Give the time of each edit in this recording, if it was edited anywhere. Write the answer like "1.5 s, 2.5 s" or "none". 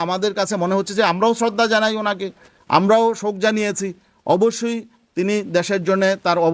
none